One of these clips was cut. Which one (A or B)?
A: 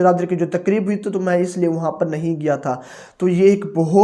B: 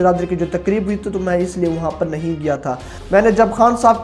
B